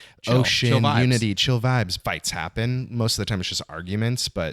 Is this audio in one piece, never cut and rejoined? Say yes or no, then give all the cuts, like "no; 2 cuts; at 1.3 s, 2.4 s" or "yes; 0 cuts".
no; 1 cut; at 1.9 s